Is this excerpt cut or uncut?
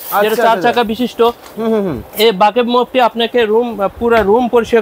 uncut